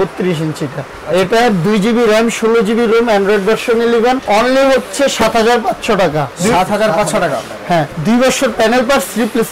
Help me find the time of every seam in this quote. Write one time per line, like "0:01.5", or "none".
0:00.9
0:04.2
0:06.3
0:07.9